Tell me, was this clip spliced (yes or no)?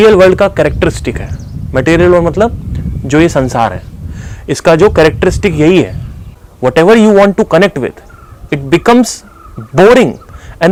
no